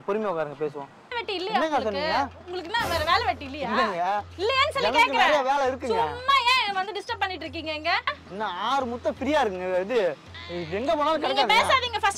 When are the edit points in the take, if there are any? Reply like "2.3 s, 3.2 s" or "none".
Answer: 1.2 s, 8.2 s